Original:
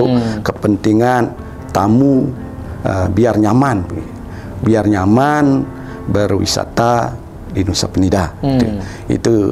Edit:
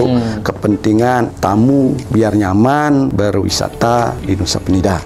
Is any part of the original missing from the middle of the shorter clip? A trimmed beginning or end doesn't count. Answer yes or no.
yes